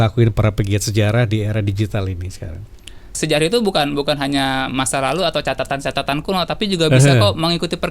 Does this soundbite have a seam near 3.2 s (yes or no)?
yes